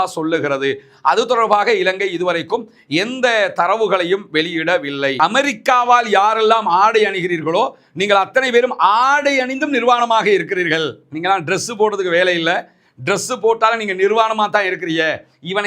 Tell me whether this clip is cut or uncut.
cut